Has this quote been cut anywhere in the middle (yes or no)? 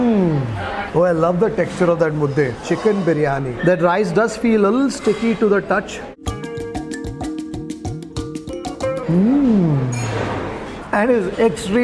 yes